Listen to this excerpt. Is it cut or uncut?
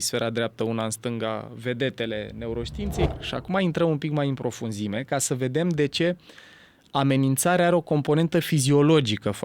cut